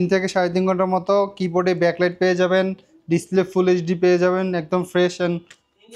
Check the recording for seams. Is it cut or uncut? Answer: uncut